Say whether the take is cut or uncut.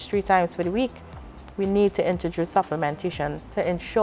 uncut